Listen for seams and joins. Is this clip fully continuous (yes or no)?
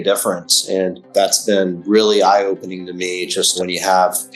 no